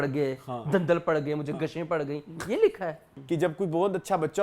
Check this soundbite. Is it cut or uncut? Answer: cut